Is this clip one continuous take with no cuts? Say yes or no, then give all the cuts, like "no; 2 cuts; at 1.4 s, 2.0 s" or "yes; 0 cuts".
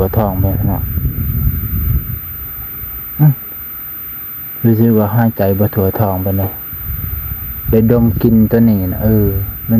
yes; 0 cuts